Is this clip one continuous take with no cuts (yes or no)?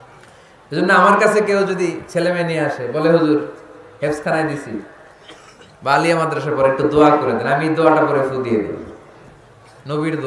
yes